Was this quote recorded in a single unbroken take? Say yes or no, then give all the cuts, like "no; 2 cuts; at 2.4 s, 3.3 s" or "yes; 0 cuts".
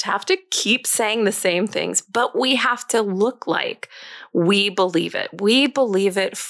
yes; 0 cuts